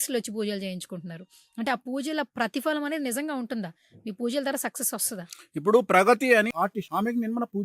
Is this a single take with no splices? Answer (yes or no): no